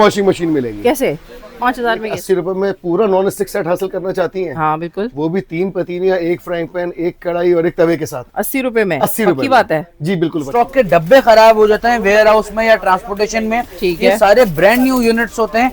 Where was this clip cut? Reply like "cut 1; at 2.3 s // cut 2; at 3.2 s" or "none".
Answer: cut 1; at 2.1 s // cut 2; at 10.4 s

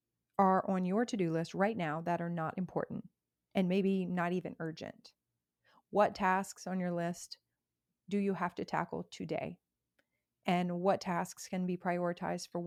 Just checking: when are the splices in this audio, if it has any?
none

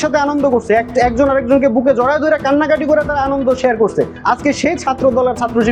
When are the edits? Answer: none

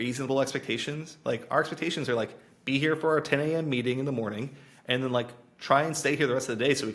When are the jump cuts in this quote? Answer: none

